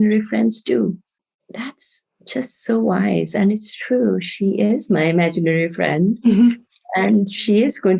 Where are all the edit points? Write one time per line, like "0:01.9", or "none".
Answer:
0:01.2